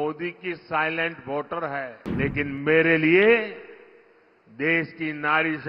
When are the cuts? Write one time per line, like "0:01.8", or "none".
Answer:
0:02.0